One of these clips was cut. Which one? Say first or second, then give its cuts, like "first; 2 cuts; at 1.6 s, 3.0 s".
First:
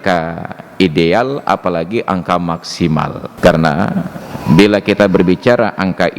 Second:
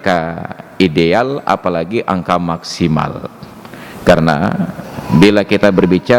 first; 1 cut; at 3.2 s